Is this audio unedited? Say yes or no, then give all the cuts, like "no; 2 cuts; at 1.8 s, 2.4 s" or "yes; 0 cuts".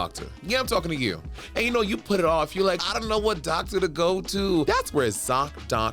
no; 2 cuts; at 2.8 s, 4.7 s